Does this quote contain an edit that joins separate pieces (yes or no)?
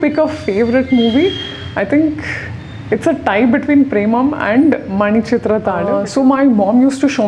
yes